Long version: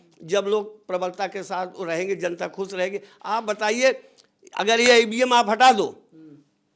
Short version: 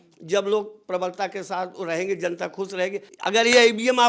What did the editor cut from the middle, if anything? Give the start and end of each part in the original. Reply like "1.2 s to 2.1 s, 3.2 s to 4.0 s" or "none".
3.1 s to 4.4 s